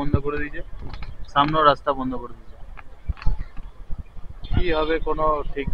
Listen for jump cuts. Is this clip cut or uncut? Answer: cut